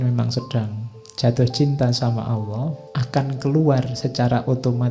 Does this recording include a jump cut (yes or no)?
yes